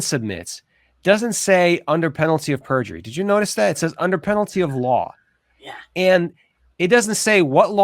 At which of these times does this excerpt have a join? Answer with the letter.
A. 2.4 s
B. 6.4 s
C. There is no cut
B